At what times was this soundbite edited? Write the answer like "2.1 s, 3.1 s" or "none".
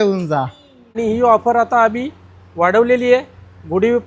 1.0 s

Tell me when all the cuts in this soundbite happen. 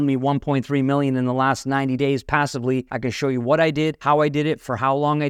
2.9 s, 4.0 s

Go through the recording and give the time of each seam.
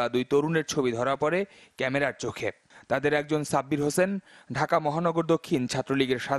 3.1 s

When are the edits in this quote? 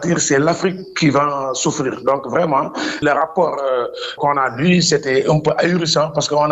3.0 s, 4.2 s

